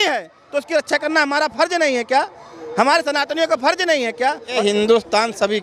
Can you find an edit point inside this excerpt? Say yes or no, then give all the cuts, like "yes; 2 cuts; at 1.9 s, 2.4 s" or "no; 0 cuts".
yes; 1 cut; at 4.6 s